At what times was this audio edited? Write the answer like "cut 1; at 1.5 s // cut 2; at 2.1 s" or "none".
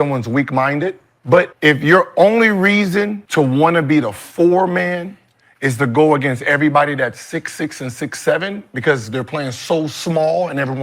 cut 1; at 1.5 s // cut 2; at 3.2 s